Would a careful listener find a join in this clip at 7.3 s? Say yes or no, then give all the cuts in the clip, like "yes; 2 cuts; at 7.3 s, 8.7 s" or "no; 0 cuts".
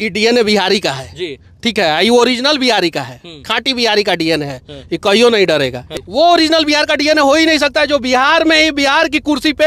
no; 1 cut; at 5.9 s